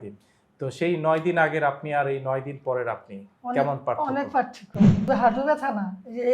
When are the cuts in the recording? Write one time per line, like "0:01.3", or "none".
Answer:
0:04.9